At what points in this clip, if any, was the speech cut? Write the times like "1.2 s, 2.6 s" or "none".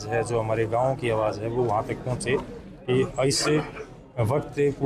none